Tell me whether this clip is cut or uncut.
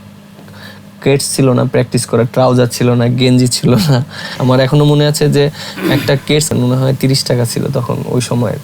cut